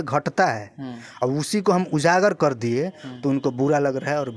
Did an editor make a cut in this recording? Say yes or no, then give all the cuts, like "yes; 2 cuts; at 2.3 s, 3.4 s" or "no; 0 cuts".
no; 0 cuts